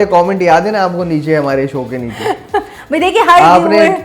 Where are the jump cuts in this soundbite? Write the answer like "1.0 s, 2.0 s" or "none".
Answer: none